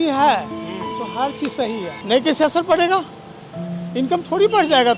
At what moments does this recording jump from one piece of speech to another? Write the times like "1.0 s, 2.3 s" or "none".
2.0 s